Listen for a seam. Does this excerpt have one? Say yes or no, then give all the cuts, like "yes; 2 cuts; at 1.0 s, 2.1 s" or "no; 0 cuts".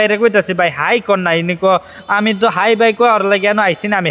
no; 0 cuts